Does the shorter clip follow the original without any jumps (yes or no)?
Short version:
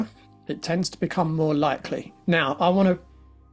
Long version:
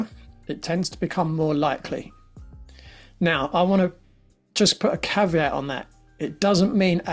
no